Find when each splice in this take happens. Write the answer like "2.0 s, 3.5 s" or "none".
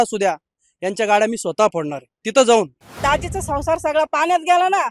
2.8 s